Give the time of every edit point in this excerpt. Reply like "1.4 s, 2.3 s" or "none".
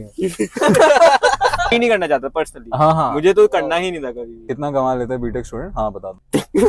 1.7 s, 4.5 s